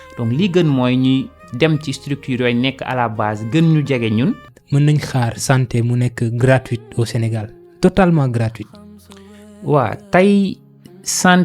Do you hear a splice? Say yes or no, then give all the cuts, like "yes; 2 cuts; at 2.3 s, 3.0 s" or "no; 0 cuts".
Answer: yes; 1 cut; at 4.5 s